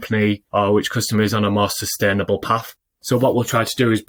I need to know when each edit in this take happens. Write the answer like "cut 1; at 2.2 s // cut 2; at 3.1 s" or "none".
none